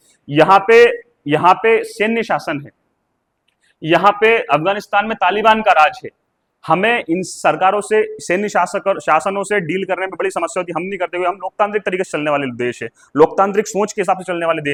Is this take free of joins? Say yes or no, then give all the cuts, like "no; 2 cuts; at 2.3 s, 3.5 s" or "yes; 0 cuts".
yes; 0 cuts